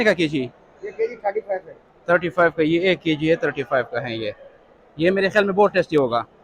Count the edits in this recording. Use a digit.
0